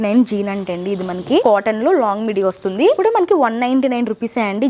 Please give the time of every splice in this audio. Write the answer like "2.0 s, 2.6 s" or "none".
1.4 s, 3.0 s